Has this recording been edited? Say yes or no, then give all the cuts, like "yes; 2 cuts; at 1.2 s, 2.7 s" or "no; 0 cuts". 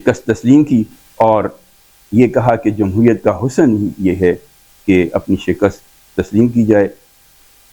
no; 0 cuts